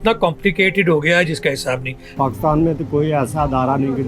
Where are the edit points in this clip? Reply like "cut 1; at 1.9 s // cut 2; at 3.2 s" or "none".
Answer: cut 1; at 2.0 s